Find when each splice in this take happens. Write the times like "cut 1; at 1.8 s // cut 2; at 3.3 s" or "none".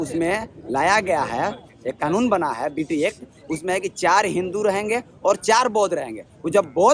none

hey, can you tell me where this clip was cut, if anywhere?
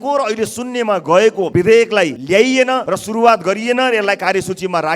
cut 1; at 1.4 s // cut 2; at 2.2 s // cut 3; at 2.9 s

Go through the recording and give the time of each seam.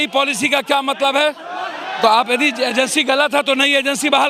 none

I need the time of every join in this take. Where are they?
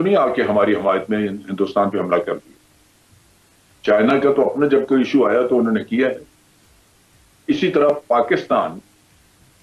none

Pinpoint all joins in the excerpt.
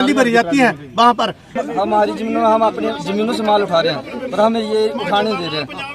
cut 1; at 1.6 s

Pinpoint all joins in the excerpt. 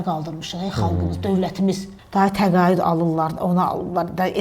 cut 1; at 1.9 s

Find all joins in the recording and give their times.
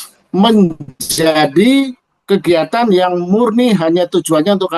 none

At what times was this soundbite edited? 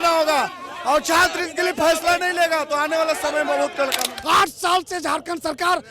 cut 1; at 4.1 s

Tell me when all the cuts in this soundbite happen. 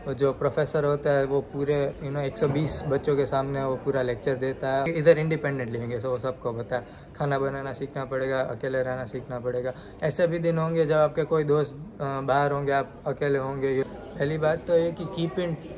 cut 1; at 4.9 s // cut 2; at 13.8 s

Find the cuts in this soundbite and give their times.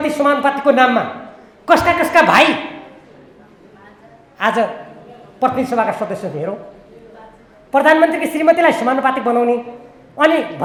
none

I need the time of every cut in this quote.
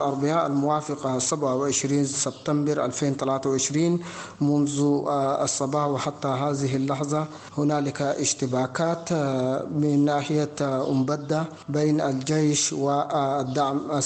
cut 1; at 7.4 s // cut 2; at 11.6 s

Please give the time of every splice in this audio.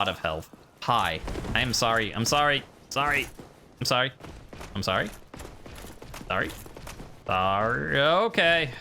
cut 1; at 7.1 s

